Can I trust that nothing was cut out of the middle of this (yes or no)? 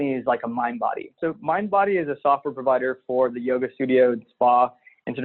no